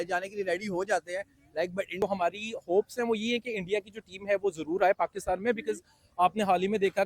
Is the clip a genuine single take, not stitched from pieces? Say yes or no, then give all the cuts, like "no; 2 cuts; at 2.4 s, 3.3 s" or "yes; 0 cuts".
no; 1 cut; at 1.9 s